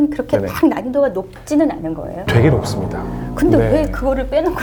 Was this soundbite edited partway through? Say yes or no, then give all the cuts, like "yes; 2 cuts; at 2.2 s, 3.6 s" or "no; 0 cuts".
no; 0 cuts